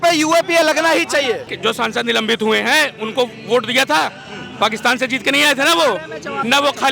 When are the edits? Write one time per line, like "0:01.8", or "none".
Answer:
0:01.5